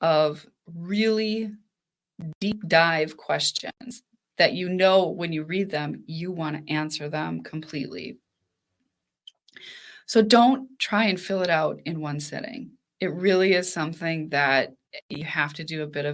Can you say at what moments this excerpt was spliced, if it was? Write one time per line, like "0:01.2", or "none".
none